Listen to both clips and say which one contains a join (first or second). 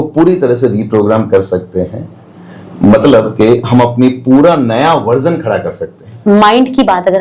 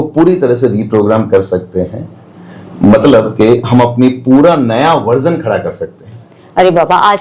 first